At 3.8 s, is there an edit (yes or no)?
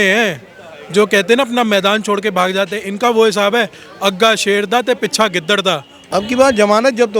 no